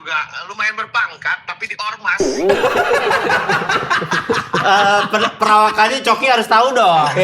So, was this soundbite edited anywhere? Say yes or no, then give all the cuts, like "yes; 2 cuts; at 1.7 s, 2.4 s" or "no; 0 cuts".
no; 0 cuts